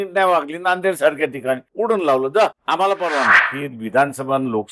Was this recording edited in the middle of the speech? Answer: yes; 1 cut; at 3.5 s

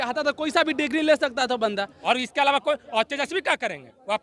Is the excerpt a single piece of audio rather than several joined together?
no; 1 cut; at 1.9 s

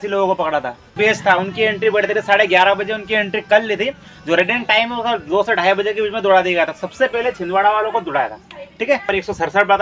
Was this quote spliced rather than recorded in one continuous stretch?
yes; 2 cuts; at 0.9 s, 9.1 s

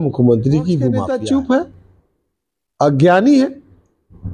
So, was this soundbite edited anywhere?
yes; 1 cut; at 1.0 s

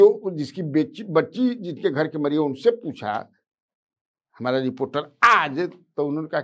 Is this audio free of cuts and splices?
yes; 0 cuts

